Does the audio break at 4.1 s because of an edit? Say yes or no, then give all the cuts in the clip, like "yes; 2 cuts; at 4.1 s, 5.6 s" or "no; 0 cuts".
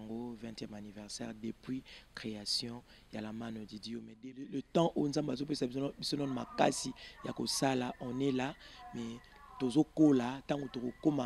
yes; 1 cut; at 4.1 s